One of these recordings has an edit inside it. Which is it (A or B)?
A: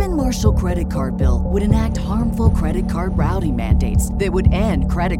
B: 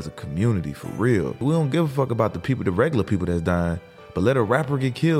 B